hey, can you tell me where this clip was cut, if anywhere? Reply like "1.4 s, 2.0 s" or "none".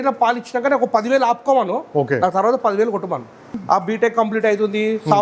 3.5 s